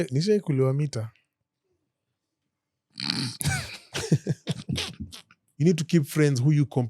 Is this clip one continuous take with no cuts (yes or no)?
no